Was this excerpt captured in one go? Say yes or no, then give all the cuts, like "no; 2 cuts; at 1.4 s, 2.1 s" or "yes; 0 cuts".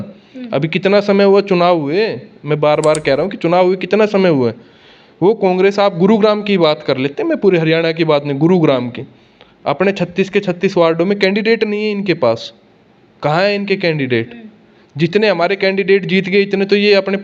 yes; 0 cuts